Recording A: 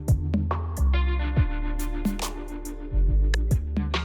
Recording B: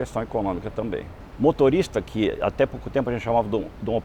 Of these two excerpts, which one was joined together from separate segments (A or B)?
B